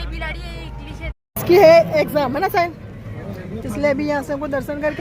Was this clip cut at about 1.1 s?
yes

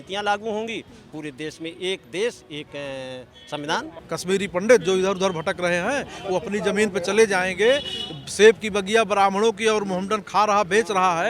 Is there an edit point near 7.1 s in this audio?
no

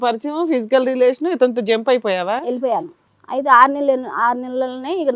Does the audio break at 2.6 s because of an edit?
yes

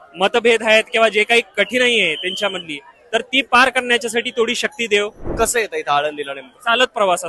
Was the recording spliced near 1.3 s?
no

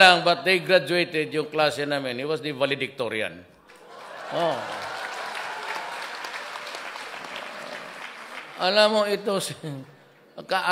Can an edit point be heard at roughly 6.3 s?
no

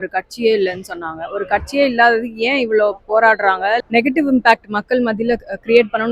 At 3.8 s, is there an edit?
yes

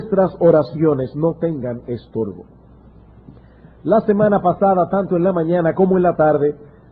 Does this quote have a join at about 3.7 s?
yes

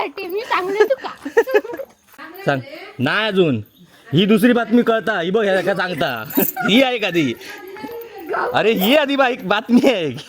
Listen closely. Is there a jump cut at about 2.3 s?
yes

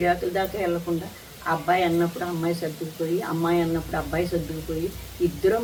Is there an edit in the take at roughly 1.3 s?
no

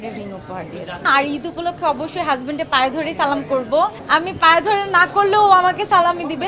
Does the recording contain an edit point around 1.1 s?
yes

